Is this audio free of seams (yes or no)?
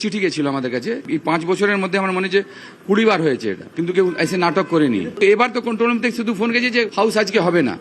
no